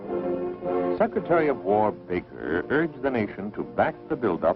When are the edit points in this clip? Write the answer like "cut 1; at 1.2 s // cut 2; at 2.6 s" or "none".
none